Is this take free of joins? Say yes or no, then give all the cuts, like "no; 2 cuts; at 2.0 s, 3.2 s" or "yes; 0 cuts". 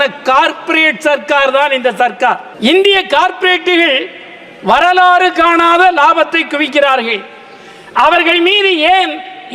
no; 1 cut; at 2.5 s